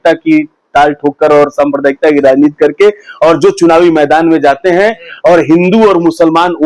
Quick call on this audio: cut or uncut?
uncut